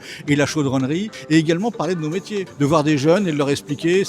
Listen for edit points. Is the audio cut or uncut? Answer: cut